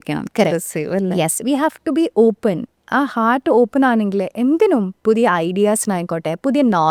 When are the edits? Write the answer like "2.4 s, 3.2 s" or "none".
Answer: none